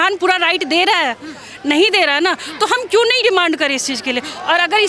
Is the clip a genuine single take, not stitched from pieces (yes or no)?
yes